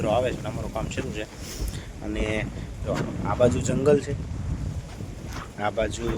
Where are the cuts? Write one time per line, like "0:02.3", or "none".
none